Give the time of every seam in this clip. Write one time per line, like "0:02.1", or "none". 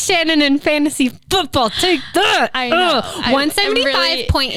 none